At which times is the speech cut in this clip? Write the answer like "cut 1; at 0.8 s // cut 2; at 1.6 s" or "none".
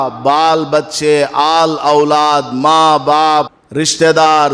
cut 1; at 3.6 s